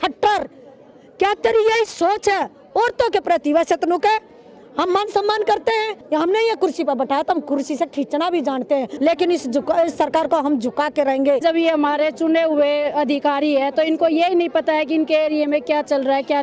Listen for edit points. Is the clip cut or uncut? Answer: cut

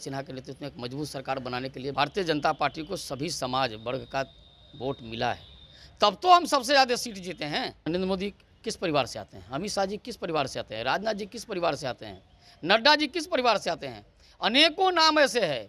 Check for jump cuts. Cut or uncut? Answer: cut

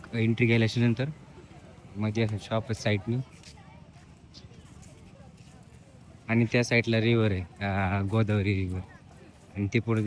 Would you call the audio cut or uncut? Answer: uncut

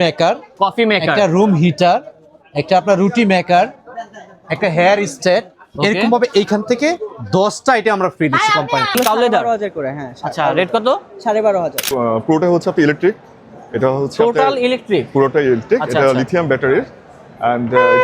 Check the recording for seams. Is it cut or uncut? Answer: cut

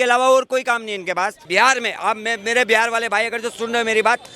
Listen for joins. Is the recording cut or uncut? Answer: cut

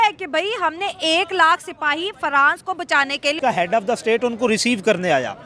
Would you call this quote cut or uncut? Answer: cut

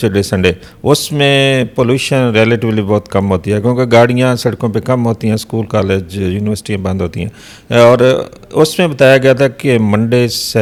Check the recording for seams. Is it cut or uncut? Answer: uncut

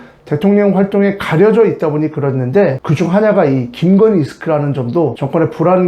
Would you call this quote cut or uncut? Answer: cut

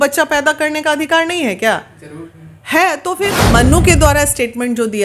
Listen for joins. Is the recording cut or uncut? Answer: cut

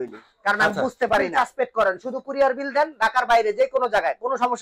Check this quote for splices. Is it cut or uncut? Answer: cut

